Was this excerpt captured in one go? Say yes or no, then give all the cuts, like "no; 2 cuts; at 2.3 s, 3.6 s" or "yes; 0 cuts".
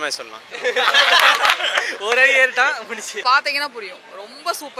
no; 1 cut; at 3.1 s